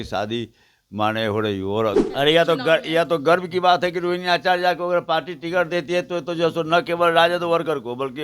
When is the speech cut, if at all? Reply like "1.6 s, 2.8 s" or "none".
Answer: 2.1 s